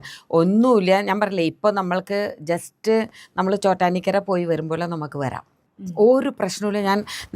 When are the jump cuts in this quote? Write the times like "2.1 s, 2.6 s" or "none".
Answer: 5.6 s